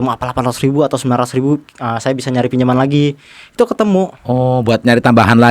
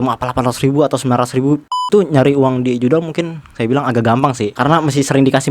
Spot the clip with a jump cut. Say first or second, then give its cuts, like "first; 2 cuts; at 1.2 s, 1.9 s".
second; 2 cuts; at 1.8 s, 4.5 s